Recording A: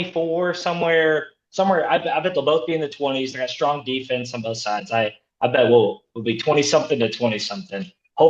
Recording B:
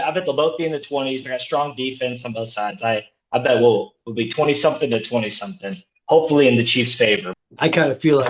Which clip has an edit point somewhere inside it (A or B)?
B